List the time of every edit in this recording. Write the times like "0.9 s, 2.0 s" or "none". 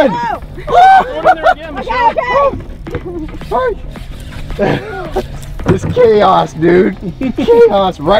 none